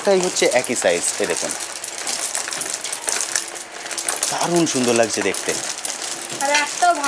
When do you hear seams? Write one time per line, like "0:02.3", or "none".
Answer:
none